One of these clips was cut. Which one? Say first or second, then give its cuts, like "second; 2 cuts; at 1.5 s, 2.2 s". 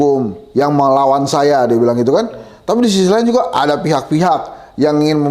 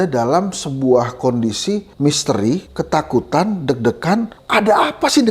second; 3 cuts; at 1.9 s, 2.7 s, 4.4 s